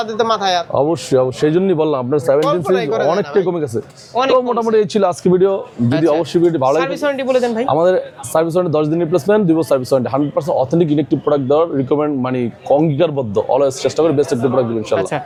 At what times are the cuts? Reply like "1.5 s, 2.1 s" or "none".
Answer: none